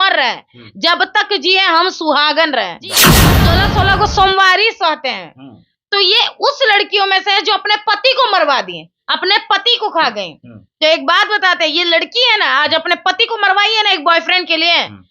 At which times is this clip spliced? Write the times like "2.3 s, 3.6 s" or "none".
3.2 s